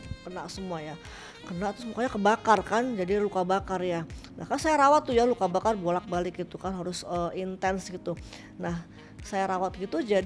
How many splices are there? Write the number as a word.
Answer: zero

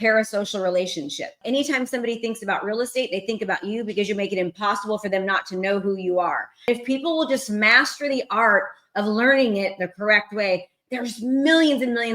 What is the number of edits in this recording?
two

